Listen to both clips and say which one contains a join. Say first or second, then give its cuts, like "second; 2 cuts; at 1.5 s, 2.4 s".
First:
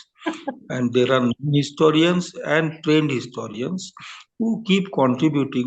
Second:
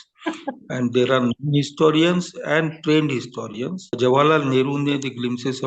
second; 1 cut; at 4.0 s